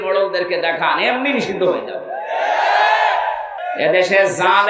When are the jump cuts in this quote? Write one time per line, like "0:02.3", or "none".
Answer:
0:03.6